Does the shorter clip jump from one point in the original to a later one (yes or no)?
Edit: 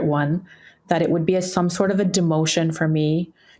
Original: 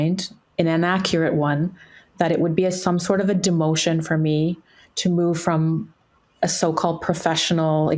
no